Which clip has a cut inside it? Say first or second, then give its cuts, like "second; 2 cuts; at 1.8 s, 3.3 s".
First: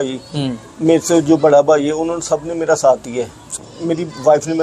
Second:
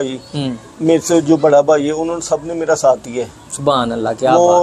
first; 1 cut; at 3.6 s